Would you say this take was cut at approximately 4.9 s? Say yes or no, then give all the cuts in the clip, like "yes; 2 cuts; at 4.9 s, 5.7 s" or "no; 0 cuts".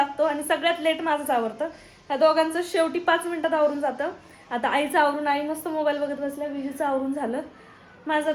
no; 0 cuts